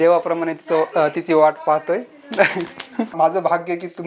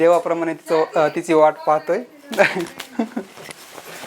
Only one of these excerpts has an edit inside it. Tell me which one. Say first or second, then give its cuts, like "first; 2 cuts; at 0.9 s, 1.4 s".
first; 1 cut; at 3.1 s